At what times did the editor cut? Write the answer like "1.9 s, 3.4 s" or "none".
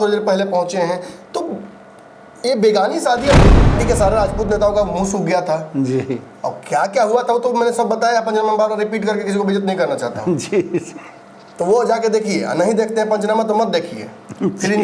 3.6 s